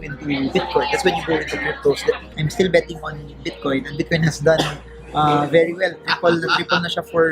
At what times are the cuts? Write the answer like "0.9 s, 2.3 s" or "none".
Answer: 2.3 s